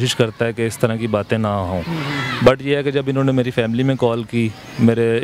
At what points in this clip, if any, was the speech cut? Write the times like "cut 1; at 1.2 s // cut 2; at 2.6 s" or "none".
none